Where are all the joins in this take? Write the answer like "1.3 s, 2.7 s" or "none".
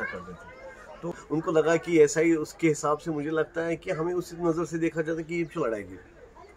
1.1 s